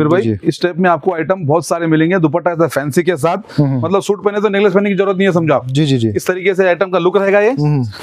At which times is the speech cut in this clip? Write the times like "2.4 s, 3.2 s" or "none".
3.8 s